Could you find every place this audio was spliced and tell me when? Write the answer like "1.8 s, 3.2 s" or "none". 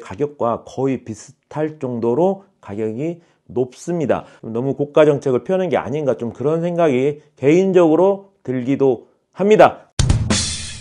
4.4 s, 9.8 s